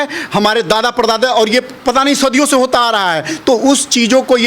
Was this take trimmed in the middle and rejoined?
no; 0 cuts

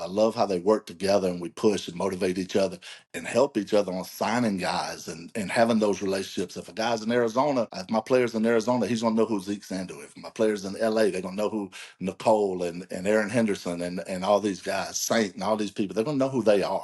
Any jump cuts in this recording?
yes; 1 cut; at 7.8 s

